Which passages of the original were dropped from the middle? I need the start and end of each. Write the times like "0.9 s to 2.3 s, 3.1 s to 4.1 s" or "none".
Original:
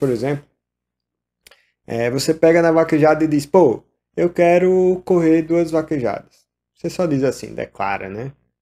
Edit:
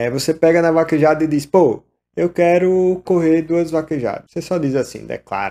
6.3 s to 6.8 s